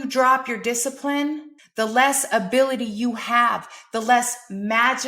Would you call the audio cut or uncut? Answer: cut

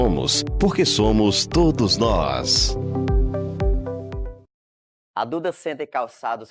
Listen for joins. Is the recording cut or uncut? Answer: uncut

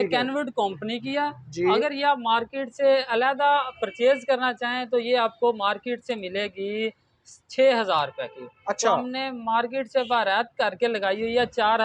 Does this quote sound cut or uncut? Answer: uncut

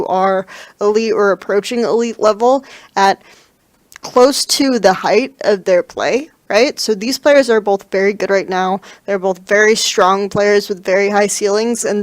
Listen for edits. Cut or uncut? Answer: cut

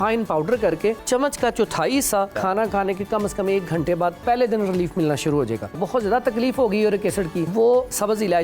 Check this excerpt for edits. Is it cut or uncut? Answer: cut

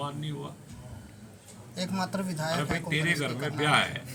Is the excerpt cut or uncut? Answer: uncut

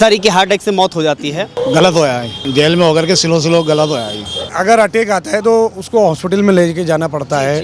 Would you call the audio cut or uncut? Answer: cut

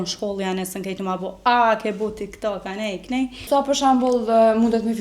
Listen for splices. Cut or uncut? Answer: cut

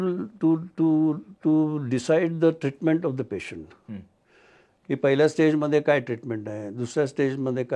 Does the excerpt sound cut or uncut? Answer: uncut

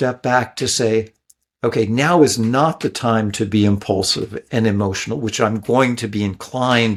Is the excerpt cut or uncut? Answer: uncut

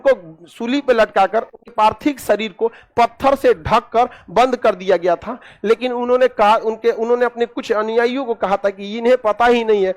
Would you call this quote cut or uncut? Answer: cut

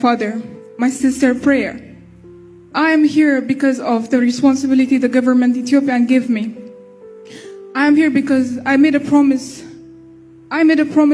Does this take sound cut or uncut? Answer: uncut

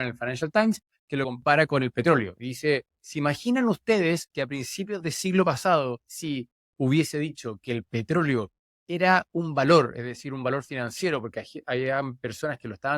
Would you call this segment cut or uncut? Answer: cut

